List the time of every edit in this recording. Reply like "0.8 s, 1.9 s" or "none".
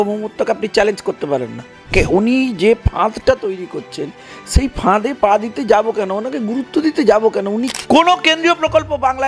1.9 s, 7.7 s

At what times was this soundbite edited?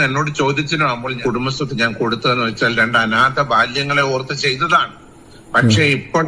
1.2 s

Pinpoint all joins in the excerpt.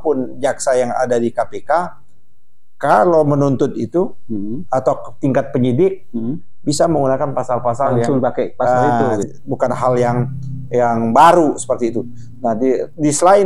9.3 s

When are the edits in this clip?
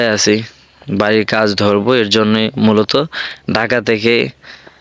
none

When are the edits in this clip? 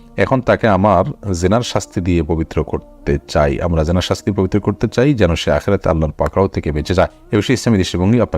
7.2 s

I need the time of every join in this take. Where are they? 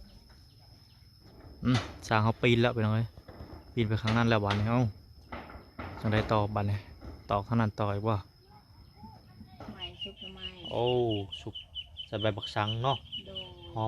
1.2 s, 9.8 s

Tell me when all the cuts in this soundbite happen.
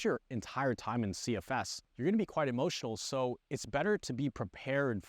1.8 s

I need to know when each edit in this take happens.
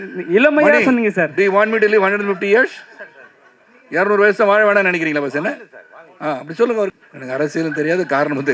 7.1 s

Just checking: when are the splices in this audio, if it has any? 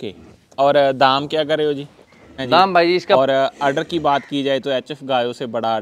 3.2 s

